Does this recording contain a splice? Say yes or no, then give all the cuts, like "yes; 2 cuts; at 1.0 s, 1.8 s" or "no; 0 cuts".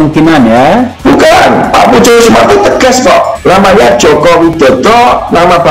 yes; 2 cuts; at 0.9 s, 3.3 s